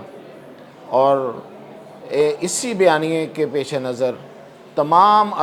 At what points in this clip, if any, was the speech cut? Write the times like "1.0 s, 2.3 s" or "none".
none